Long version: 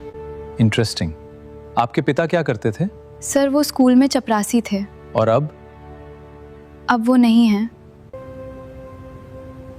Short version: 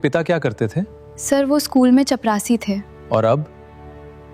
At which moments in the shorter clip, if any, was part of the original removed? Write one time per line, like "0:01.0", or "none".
none

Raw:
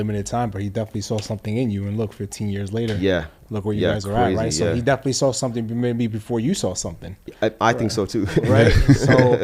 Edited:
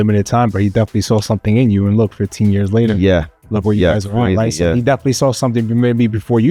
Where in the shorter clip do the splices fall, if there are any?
none

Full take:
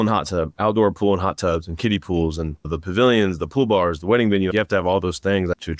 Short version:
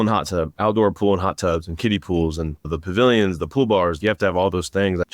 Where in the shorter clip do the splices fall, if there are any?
0:04.0

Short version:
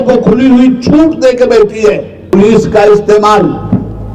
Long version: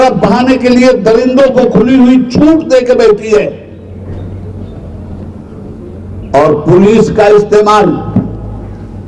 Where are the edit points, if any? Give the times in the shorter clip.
0:02.3

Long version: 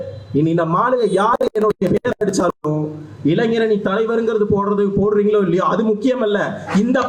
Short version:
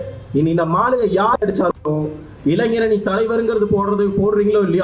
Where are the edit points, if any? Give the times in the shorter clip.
0:01.4

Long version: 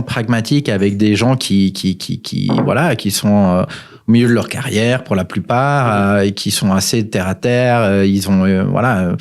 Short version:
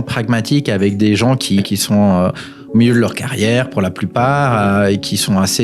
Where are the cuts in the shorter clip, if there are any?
0:01.6

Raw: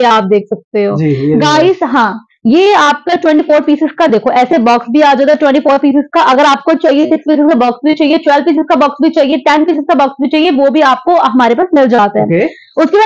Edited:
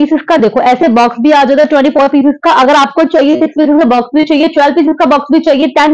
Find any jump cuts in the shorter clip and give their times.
none

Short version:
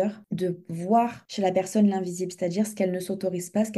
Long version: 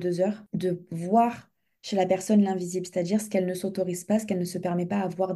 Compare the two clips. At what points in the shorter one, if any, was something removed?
0:01.2

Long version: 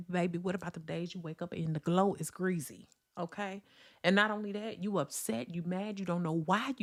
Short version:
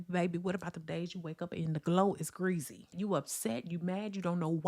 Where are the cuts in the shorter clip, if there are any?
0:02.9

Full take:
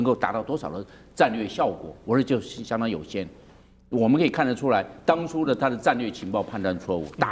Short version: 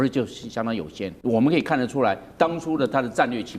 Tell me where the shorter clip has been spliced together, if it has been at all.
0:01.1

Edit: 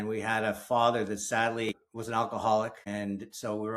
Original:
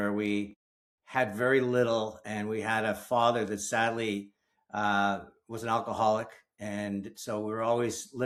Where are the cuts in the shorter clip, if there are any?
0:01.7
0:02.8

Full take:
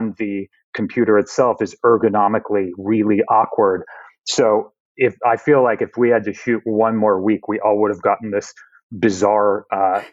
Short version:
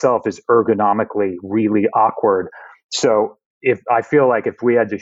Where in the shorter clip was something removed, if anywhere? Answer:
none

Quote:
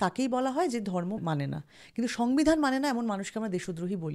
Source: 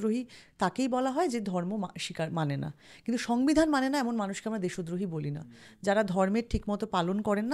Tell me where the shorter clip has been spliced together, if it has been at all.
0:01.2

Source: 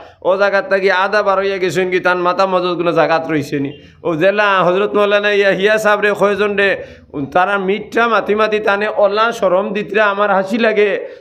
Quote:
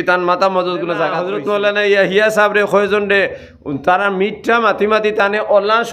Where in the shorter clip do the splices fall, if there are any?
0:01.2

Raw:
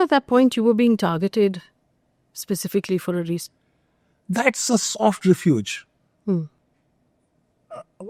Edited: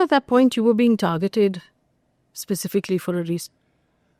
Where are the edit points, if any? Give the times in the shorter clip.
none

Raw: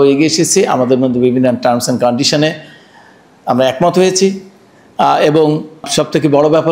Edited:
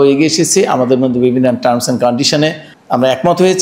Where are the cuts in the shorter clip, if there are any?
0:02.7

